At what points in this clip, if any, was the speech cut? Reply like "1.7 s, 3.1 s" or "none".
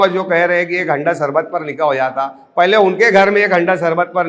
none